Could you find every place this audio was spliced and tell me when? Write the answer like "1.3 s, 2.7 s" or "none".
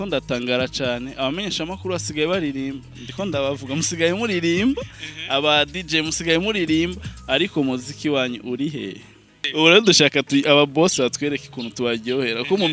9.4 s